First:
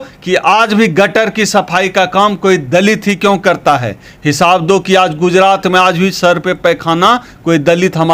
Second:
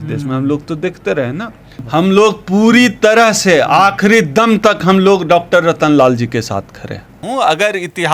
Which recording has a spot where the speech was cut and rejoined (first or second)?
second